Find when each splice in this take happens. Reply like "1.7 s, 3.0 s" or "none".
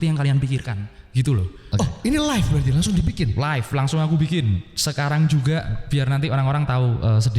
1.6 s